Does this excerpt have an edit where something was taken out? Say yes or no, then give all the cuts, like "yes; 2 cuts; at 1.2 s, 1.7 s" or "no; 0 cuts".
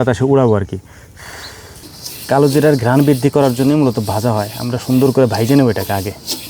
yes; 1 cut; at 1.8 s